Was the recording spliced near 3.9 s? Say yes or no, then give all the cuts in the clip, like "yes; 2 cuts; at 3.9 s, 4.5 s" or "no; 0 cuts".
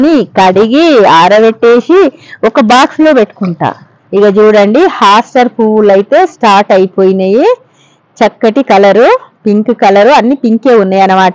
yes; 1 cut; at 3.9 s